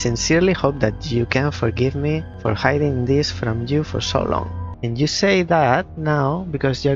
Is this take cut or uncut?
uncut